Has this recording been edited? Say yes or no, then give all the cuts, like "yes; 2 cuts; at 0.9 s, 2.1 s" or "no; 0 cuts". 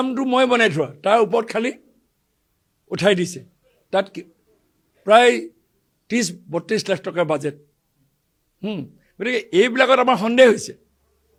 no; 0 cuts